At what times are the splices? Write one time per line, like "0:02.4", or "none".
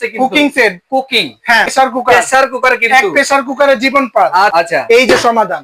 0:01.7
0:04.5